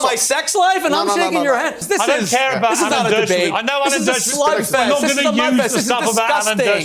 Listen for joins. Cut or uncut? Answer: cut